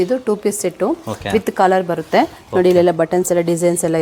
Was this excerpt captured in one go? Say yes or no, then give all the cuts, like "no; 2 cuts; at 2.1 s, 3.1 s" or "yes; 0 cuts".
yes; 0 cuts